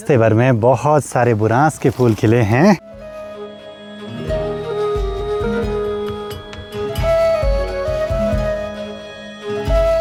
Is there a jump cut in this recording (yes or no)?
no